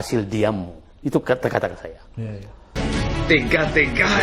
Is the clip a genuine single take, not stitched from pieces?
no; 1 cut; at 2.7 s

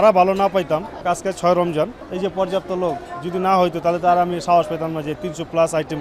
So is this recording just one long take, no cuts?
no; 2 cuts; at 1.0 s, 2.0 s

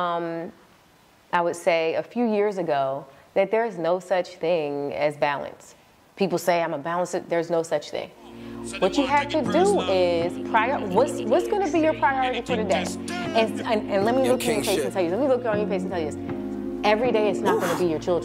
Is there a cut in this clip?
no; 0 cuts

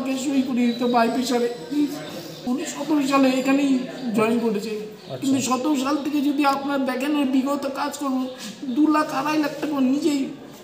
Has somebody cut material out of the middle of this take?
yes; 1 cut; at 2.3 s

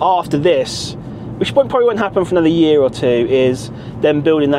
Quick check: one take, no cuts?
yes; 0 cuts

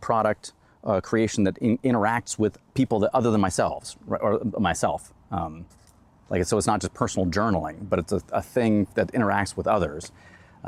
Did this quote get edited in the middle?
no; 0 cuts

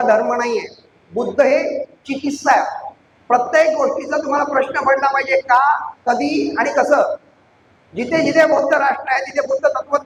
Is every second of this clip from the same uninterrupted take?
yes; 0 cuts

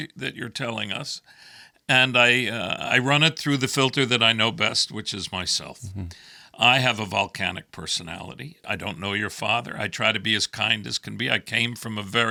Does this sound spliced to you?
no; 0 cuts

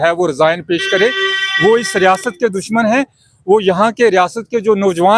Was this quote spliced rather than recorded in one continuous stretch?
no; 0 cuts

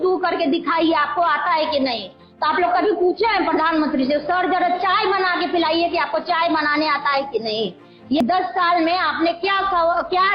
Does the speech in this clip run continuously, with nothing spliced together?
no; 1 cut; at 8.2 s

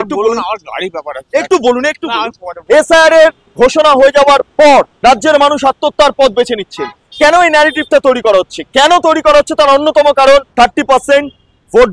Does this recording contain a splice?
yes; 4 cuts; at 2.5 s, 3.4 s, 4.9 s, 10.5 s

